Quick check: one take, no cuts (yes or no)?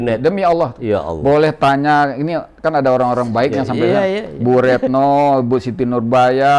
yes